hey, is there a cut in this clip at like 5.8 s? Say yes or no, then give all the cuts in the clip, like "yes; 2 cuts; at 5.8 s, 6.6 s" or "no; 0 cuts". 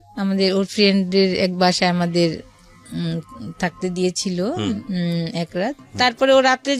yes; 1 cut; at 5.8 s